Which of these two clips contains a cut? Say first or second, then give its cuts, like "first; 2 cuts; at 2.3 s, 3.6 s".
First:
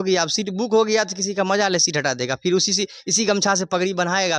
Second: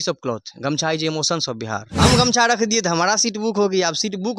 second; 1 cut; at 1.9 s